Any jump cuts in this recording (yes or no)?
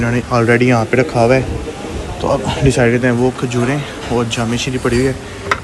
no